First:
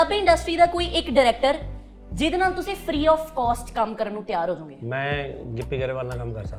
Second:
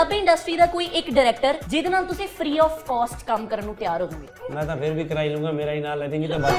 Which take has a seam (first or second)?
second